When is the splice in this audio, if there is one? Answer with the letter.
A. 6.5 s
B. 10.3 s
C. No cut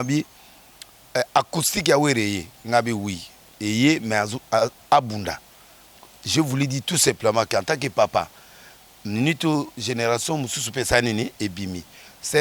C